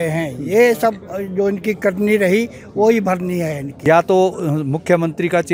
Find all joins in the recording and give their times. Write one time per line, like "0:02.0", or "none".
0:03.7